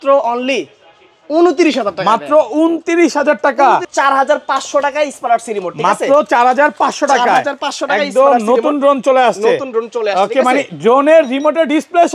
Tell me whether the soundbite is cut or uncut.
cut